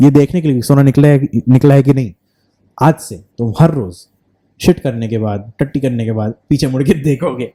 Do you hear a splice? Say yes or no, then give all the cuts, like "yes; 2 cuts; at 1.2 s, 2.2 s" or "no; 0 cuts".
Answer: no; 0 cuts